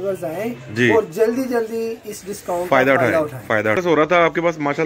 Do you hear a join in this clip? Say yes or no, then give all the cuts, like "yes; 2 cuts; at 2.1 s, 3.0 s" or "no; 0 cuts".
yes; 1 cut; at 3.8 s